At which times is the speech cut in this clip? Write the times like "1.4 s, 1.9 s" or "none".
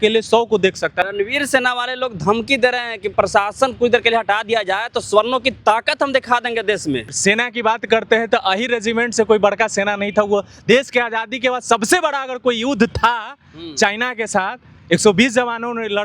1.1 s, 3.1 s, 7.2 s